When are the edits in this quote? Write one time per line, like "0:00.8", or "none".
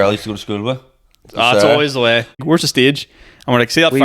0:02.4